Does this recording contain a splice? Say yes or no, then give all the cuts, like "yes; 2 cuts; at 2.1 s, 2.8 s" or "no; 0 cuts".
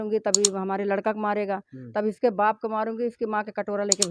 no; 0 cuts